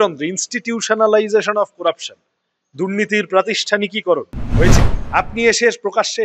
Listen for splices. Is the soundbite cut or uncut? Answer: cut